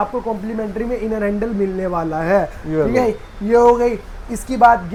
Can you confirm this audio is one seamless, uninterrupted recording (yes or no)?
yes